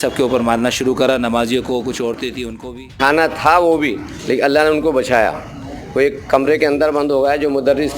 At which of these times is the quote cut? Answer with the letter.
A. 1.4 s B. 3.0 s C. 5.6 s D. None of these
B